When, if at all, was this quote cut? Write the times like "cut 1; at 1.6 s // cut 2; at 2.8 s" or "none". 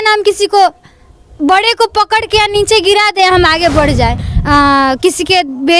cut 1; at 4.2 s